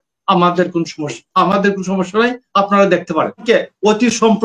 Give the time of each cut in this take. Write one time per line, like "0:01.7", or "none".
0:03.4